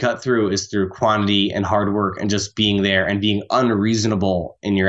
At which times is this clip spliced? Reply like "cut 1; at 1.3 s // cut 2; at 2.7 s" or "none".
none